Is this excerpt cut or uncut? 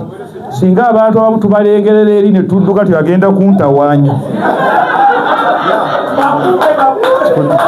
uncut